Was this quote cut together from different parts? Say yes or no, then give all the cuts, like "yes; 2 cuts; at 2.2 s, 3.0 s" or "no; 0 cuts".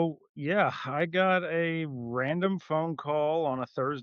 no; 0 cuts